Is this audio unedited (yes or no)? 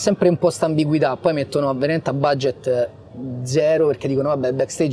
yes